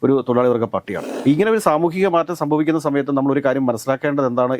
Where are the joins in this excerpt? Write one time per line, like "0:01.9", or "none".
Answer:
0:01.0